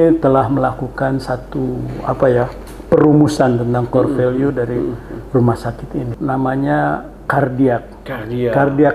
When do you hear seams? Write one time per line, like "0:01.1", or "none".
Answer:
0:06.1